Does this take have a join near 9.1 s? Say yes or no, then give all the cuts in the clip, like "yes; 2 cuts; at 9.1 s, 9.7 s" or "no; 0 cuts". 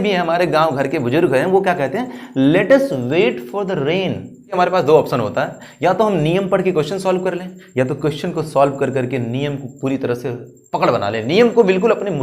no; 1 cut; at 4.5 s